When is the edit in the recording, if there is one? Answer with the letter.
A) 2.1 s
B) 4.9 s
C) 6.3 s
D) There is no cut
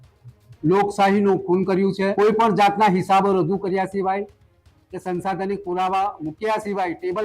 A